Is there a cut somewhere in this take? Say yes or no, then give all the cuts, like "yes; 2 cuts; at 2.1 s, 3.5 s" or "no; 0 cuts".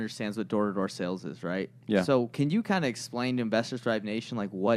no; 0 cuts